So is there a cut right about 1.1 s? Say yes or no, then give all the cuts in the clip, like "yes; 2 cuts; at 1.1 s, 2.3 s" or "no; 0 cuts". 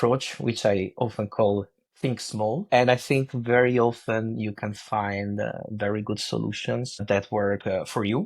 no; 1 cut; at 2.6 s